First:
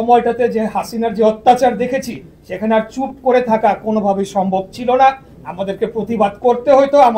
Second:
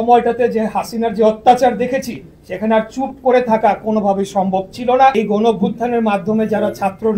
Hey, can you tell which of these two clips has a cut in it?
second; 1 cut; at 5.1 s

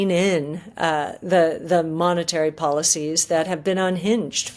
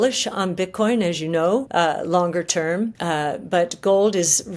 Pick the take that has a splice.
second; 2 cuts; at 1.7 s, 3.0 s

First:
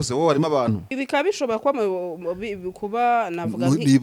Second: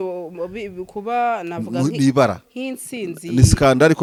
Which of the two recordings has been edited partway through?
first; 1 cut; at 0.9 s

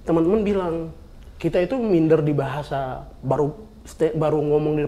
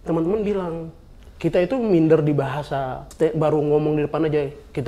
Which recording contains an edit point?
second; 1 cut; at 3.0 s

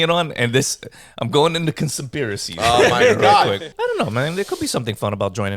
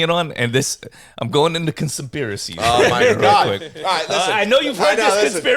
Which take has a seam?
first; 1 cut; at 3.7 s

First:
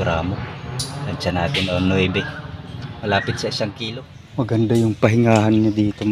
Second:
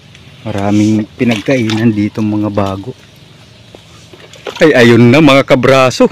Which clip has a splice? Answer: first; 1 cut; at 3.8 s

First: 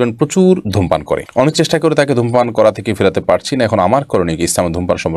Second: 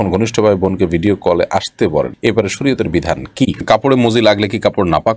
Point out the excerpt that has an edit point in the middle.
second; 1 cut; at 3.6 s

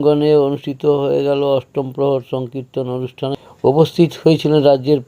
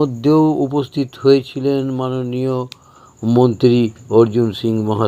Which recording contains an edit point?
first; 1 cut; at 3.4 s

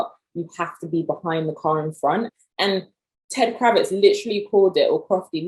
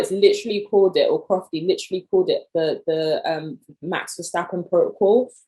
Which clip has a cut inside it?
first; 1 cut; at 2.3 s

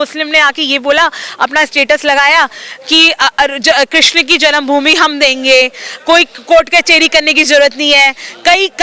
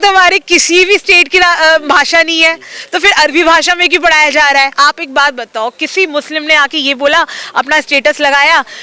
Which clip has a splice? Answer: second; 1 cut; at 4.7 s

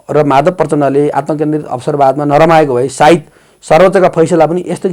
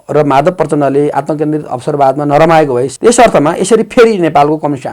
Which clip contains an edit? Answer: second; 1 cut; at 2.9 s

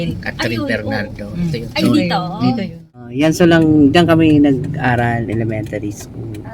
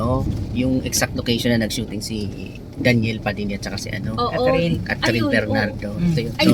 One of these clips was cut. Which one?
first; 1 cut; at 3.1 s

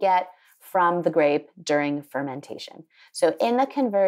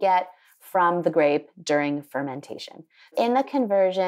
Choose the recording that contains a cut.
second; 1 cut; at 3.1 s

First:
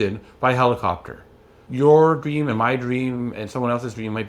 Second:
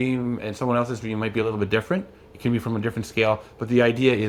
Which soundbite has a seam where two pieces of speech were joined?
first; 1 cut; at 1.6 s

